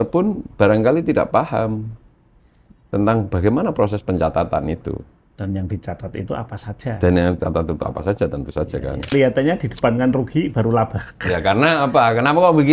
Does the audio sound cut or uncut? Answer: cut